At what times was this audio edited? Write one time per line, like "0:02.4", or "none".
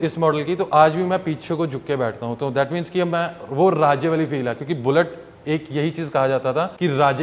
none